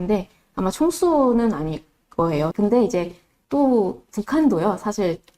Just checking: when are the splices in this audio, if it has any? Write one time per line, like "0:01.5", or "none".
0:02.5